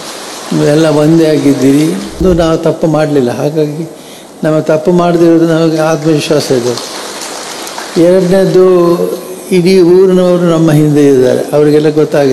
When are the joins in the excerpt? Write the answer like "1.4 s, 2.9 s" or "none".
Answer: 2.2 s